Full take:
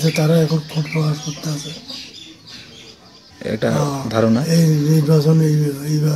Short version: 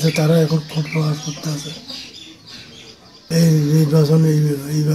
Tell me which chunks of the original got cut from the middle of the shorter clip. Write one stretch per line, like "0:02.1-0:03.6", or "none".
0:03.3-0:04.4

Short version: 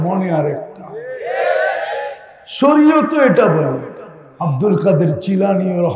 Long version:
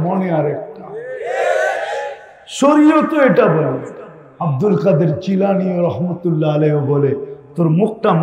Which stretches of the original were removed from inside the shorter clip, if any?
none

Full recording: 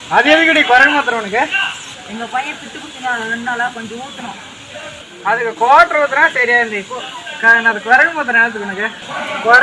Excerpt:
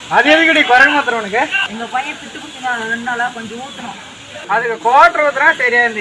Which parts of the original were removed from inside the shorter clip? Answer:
0:01.6-0:02.0
0:04.7-0:05.0

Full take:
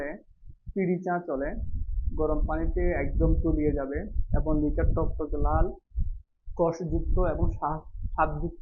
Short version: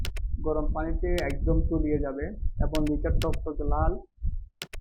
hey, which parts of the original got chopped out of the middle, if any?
none

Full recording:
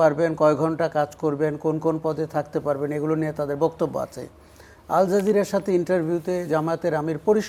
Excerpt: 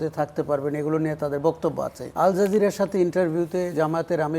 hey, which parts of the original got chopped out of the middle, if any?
0:04.2-0:04.7

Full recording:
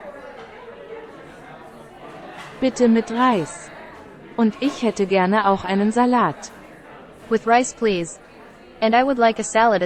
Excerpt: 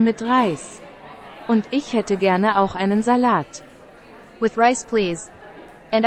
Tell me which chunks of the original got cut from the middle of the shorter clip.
none

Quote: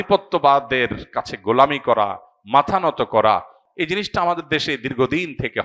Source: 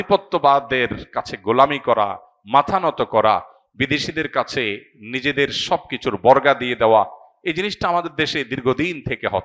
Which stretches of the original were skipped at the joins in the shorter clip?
0:03.6-0:07.3

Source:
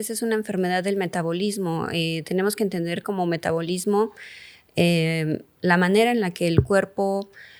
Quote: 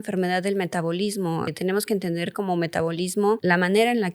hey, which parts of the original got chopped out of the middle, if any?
0:01.9-0:02.2
0:04.1-0:05.6

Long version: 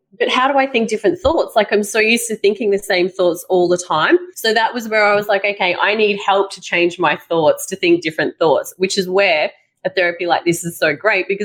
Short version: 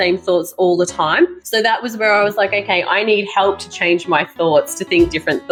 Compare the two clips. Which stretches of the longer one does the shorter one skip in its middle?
none

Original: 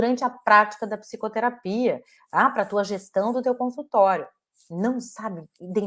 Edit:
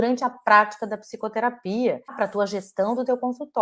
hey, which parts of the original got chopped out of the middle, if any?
0:02.2-0:02.5

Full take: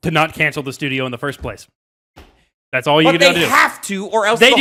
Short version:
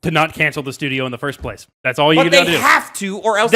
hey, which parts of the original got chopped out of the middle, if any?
0:01.7-0:02.5

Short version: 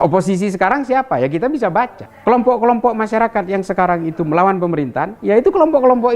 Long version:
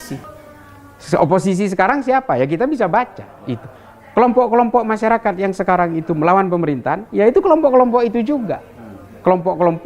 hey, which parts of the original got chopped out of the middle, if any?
0:03.2-0:03.9

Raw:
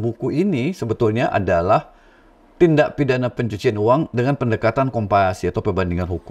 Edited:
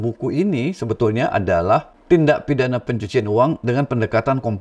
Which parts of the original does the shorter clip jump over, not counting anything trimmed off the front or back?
0:01.9-0:02.4

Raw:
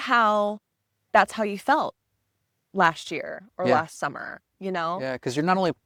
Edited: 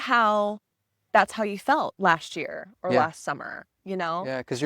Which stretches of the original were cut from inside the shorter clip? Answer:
0:01.9-0:02.7

